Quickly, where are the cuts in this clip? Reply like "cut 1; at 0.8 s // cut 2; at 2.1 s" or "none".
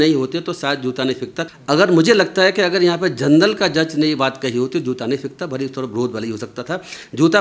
cut 1; at 1.4 s